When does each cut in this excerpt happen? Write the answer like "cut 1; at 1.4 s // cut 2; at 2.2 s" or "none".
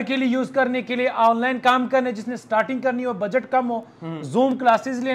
none